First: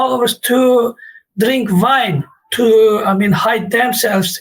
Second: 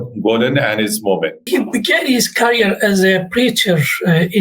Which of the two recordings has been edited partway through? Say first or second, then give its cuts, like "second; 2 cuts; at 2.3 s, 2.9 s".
second; 1 cut; at 1.4 s